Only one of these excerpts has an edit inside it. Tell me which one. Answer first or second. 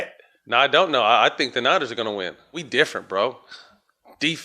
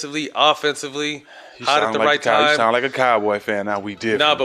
first